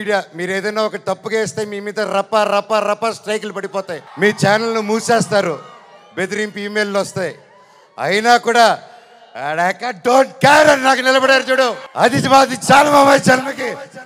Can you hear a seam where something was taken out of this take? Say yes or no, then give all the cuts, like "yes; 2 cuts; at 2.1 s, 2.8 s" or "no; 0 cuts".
yes; 2 cuts; at 4.0 s, 11.8 s